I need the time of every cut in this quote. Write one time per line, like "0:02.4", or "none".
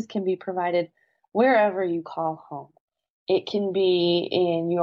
none